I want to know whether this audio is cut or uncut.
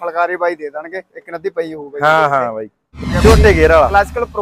cut